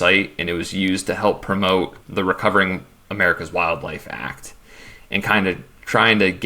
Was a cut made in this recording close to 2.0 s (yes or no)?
yes